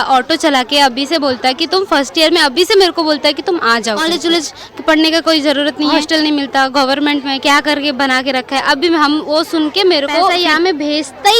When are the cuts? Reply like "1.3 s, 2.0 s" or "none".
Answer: 4.0 s, 6.0 s, 10.3 s